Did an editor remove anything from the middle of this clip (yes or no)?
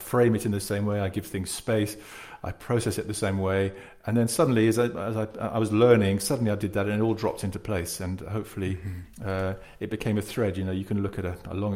no